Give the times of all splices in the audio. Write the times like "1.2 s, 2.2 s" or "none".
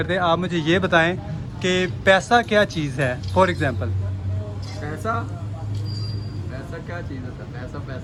none